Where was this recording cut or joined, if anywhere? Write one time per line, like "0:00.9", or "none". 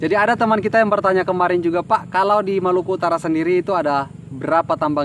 none